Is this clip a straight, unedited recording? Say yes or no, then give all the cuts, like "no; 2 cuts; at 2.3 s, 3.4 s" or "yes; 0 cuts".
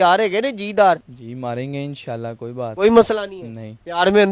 no; 2 cuts; at 1.1 s, 2.6 s